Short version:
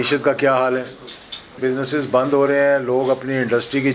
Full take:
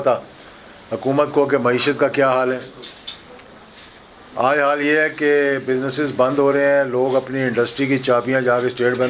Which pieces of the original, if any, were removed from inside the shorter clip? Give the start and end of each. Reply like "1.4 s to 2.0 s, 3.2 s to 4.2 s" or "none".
3.3 s to 5.6 s